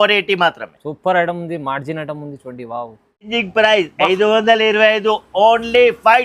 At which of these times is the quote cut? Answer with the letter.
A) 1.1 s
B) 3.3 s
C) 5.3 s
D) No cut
B